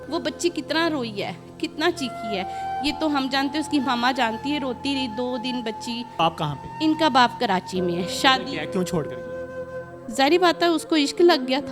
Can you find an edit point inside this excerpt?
yes; 1 cut; at 6.2 s

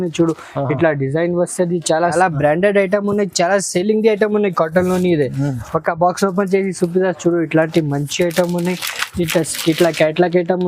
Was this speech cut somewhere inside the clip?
yes; 1 cut; at 2.1 s

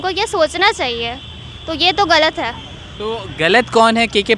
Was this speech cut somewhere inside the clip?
no; 0 cuts

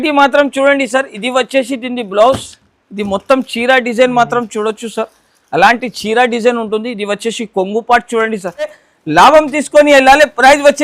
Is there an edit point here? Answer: yes; 1 cut; at 8.9 s

